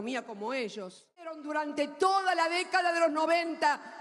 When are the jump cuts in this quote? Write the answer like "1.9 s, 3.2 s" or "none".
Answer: 1.4 s